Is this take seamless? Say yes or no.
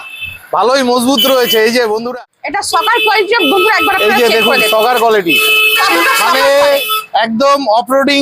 no